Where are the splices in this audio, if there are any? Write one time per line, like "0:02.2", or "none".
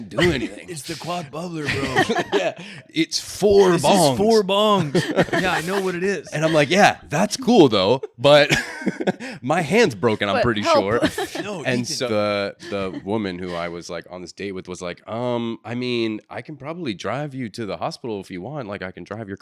0:12.1

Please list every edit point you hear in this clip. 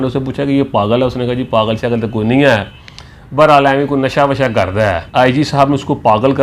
0:05.0

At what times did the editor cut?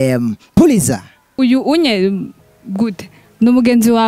0:01.3

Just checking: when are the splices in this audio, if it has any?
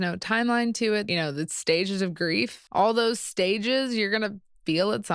0:01.1
0:02.6

